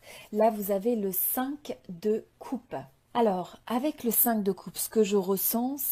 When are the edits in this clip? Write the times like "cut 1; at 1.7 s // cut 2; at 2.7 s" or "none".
cut 1; at 3.0 s

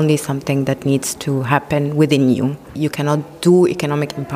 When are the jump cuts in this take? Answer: cut 1; at 2.6 s

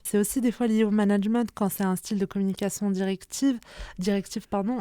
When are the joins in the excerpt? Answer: none

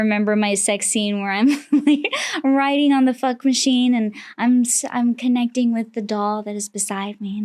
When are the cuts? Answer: none

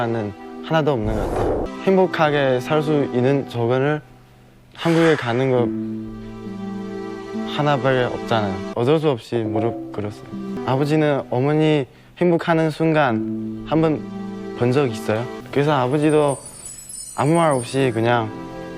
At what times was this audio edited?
cut 1; at 1.7 s // cut 2; at 8.7 s // cut 3; at 10.6 s // cut 4; at 15.4 s

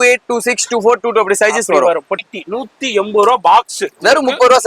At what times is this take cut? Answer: cut 1; at 2.1 s

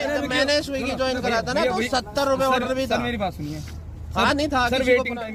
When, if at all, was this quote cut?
none

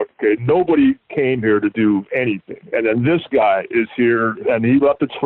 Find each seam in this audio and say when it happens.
cut 1; at 2.5 s // cut 2; at 4.4 s

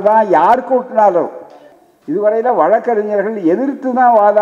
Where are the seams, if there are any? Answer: cut 1; at 1.6 s

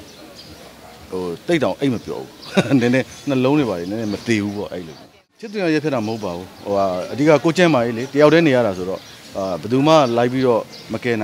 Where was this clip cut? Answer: none

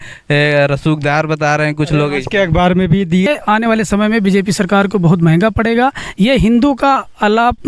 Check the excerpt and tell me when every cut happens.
cut 1; at 3.3 s

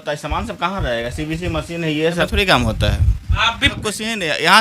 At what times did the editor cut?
cut 1; at 2.3 s // cut 2; at 3.6 s

